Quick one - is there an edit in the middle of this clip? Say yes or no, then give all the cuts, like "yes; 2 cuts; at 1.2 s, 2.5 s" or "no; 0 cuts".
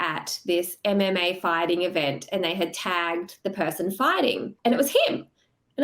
yes; 1 cut; at 4.5 s